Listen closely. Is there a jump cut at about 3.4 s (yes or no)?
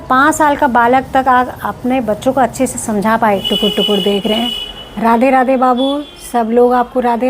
yes